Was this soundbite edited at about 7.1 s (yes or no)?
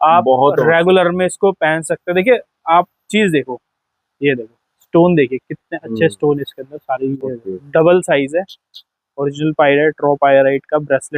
yes